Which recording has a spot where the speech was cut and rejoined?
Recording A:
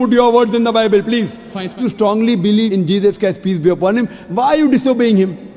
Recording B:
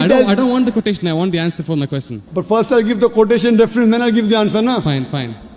A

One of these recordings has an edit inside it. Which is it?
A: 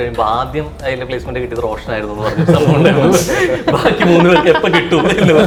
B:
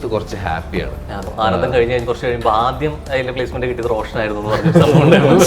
B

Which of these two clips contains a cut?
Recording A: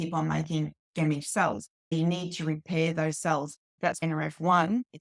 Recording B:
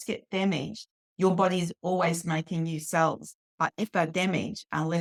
A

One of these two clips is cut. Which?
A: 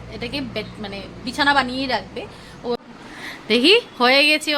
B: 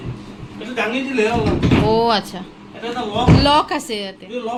A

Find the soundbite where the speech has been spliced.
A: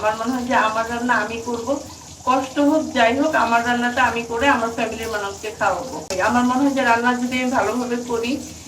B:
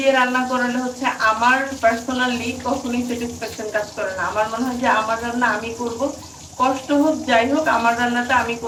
A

